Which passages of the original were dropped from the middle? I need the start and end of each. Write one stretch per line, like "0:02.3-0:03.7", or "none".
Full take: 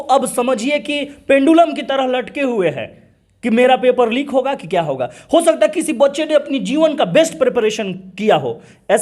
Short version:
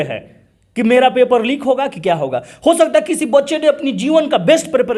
none